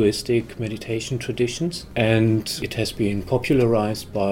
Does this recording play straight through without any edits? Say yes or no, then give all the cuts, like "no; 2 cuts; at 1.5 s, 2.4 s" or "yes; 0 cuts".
no; 2 cuts; at 1.8 s, 2.6 s